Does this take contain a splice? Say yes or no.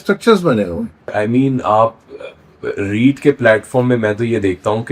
yes